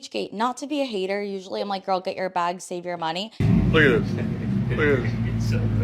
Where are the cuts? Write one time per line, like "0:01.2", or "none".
0:03.3

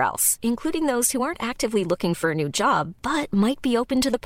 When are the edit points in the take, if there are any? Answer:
none

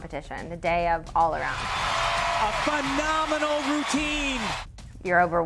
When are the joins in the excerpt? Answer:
0:01.6
0:04.5

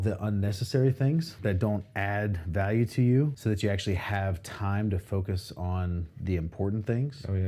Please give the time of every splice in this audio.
0:01.3
0:03.4

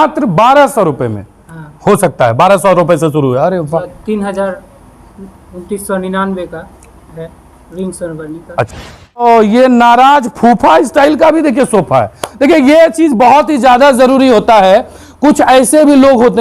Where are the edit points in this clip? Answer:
0:03.9
0:09.1

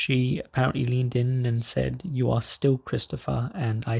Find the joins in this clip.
none

